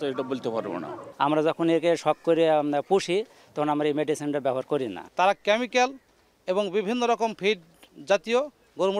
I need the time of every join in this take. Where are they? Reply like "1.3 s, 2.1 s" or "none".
1.0 s, 5.0 s